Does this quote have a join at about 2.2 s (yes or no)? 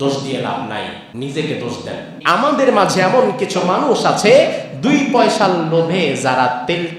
yes